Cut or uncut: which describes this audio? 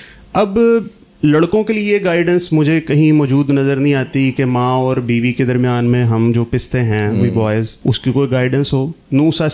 cut